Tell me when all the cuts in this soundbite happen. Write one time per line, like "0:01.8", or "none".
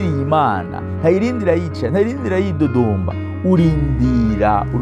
none

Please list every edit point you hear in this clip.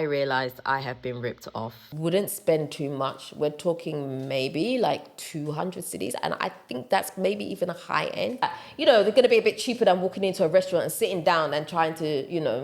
0:01.9
0:08.5

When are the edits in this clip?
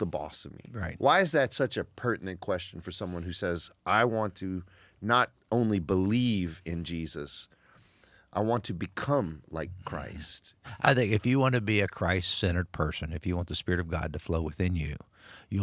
0:10.8

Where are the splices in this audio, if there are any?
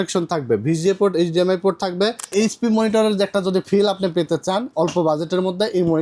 0:02.3

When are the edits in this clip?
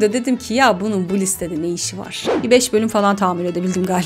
0:02.3

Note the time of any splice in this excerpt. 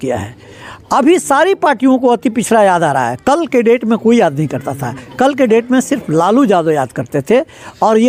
none

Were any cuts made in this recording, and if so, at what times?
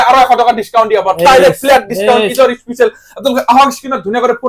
none

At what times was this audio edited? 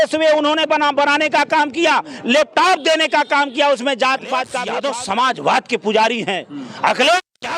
0:04.6

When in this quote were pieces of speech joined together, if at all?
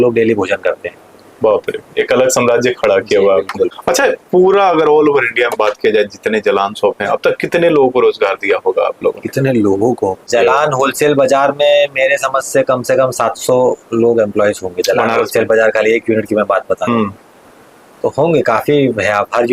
0:03.8
0:10.3

